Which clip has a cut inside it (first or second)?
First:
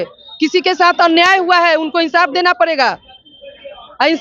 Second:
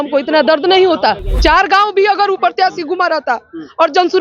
second